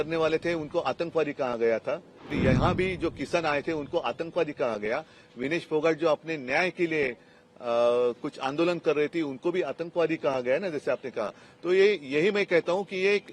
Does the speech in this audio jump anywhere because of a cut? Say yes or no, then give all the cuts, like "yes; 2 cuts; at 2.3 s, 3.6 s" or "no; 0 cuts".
yes; 1 cut; at 2.4 s